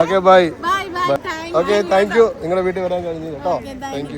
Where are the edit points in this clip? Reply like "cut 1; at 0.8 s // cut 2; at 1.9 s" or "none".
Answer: cut 1; at 1.2 s